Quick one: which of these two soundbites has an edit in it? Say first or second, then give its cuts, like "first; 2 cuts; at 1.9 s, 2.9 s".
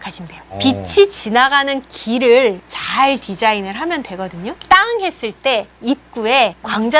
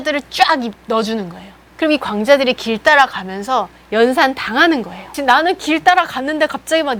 first; 1 cut; at 4.6 s